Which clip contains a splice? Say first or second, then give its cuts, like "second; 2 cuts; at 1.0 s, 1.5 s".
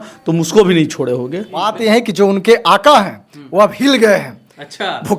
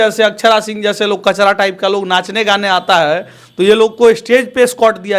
first; 1 cut; at 1.7 s